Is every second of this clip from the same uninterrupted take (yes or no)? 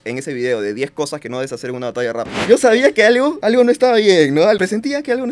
no